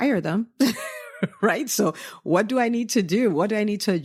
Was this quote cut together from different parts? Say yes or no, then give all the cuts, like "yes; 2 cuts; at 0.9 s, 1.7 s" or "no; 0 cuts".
no; 0 cuts